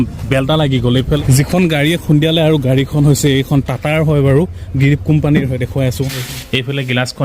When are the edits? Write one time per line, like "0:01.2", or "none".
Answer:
0:01.2
0:06.1